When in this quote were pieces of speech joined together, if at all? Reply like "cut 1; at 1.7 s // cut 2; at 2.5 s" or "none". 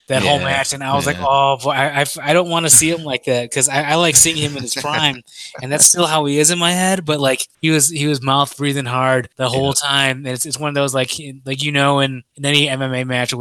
cut 1; at 7.5 s // cut 2; at 9.3 s // cut 3; at 12.3 s